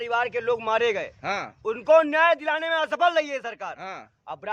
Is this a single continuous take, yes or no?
yes